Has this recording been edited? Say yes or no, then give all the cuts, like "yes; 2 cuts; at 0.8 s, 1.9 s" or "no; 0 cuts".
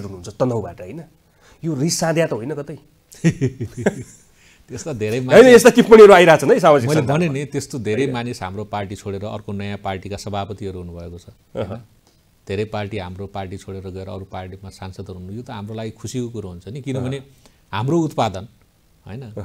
no; 0 cuts